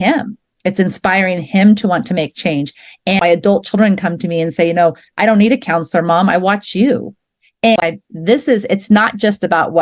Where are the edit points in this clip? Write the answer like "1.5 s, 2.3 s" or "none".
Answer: 3.2 s, 7.8 s